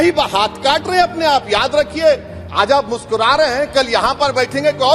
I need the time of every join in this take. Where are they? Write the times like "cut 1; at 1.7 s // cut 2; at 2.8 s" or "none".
none

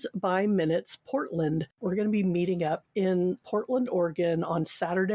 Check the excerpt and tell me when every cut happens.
cut 1; at 1.7 s

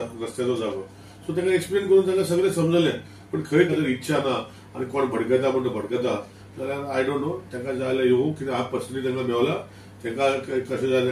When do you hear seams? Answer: cut 1; at 3.7 s

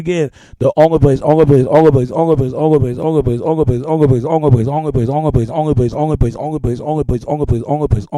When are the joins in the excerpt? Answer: cut 1; at 4.7 s

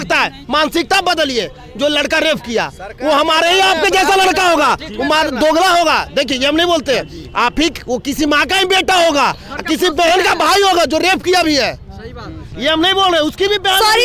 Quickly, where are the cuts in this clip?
none

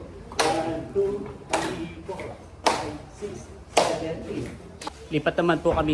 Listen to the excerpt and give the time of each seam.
cut 1; at 4.7 s

